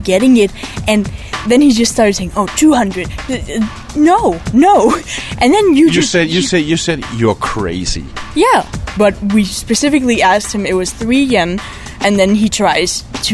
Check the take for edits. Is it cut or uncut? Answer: cut